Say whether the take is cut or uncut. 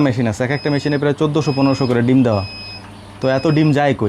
uncut